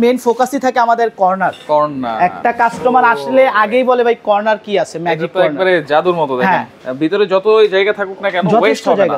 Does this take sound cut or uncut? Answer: cut